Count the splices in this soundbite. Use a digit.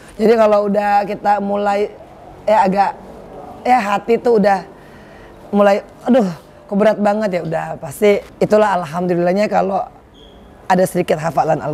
1